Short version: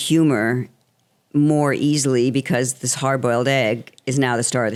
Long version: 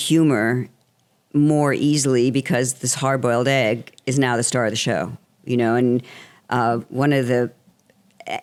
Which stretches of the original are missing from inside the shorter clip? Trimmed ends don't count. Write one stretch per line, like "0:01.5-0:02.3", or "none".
none